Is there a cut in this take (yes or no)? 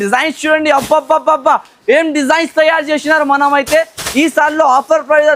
no